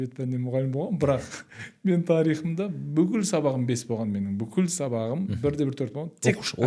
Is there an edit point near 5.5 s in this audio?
no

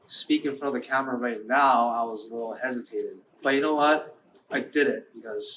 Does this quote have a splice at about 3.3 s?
yes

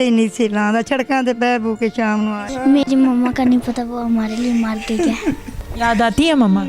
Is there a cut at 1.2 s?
no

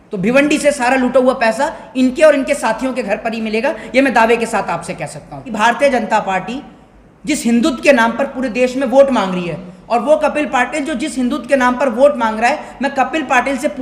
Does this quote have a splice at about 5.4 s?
yes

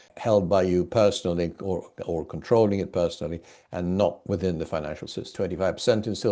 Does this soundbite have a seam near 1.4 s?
no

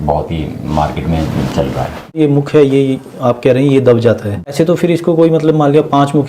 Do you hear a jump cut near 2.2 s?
yes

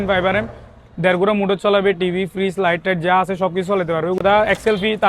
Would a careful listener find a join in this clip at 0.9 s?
no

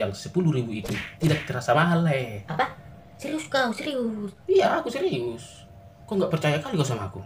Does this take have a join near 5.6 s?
no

